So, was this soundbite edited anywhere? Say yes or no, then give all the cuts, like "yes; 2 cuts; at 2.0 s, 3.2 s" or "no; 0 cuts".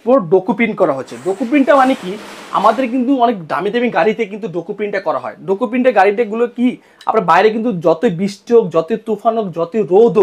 no; 0 cuts